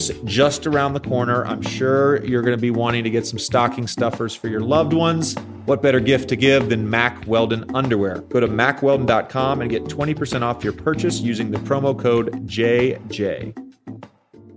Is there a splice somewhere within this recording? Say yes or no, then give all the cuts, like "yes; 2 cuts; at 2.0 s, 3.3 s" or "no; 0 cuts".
yes; 1 cut; at 13.4 s